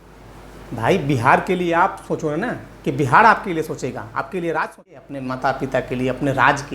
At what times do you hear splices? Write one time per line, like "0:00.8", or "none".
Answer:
0:05.1